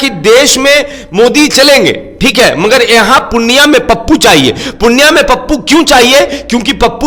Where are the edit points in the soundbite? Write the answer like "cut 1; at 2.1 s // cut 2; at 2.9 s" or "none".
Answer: none